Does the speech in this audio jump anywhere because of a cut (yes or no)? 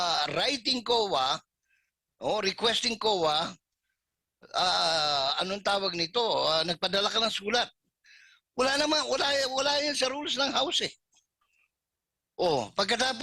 no